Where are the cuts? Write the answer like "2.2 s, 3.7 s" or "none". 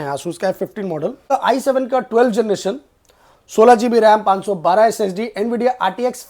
1.3 s